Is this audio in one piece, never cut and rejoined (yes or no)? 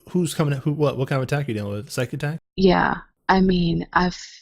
no